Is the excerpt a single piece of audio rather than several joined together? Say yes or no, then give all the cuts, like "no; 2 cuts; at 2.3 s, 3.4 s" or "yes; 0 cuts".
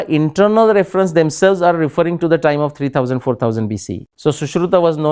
no; 1 cut; at 4.0 s